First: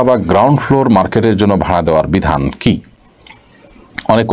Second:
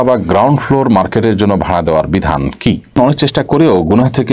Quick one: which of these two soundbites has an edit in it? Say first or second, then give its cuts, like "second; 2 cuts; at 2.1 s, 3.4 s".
second; 1 cut; at 3.1 s